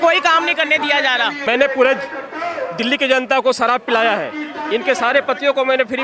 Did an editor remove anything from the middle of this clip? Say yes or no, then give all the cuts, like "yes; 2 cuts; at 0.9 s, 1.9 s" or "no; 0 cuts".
yes; 1 cut; at 1.4 s